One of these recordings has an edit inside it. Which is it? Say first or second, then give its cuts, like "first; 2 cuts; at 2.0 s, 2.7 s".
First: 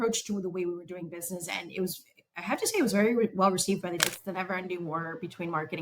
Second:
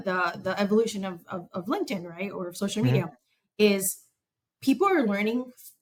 first; 1 cut; at 4.0 s